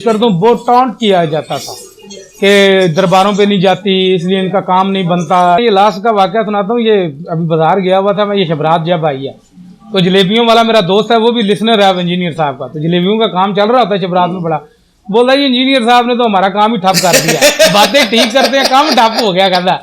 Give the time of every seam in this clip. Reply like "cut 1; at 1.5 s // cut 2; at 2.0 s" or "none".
cut 1; at 5.6 s